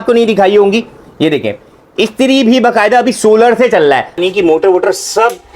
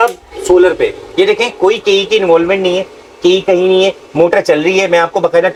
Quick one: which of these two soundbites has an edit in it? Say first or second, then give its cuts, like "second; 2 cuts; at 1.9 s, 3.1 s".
first; 1 cut; at 4.1 s